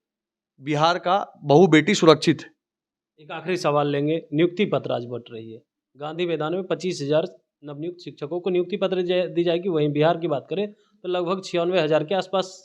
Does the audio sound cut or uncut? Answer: uncut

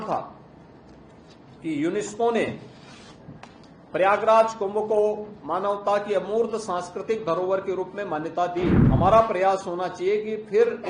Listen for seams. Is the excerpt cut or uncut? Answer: cut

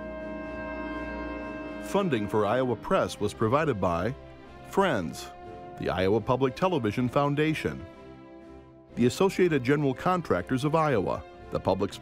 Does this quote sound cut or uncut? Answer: cut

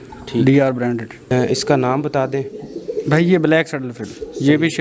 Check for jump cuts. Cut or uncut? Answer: cut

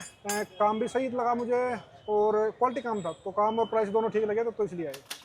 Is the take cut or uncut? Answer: uncut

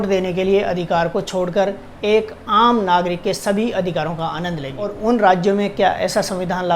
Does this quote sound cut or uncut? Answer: cut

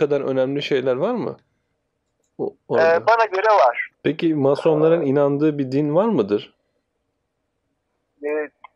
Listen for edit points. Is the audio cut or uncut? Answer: cut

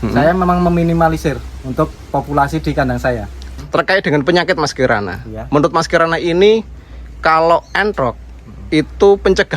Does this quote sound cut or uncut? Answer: cut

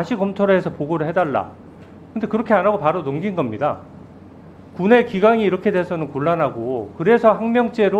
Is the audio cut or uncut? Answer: uncut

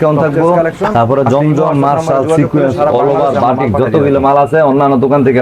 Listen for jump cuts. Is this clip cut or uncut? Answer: uncut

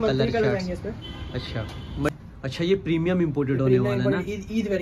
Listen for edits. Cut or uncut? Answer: cut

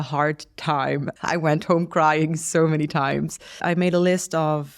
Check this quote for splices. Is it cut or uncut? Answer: cut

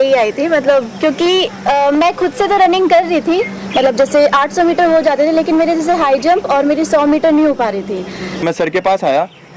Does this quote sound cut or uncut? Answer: cut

